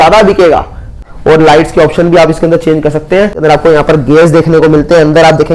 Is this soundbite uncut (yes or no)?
no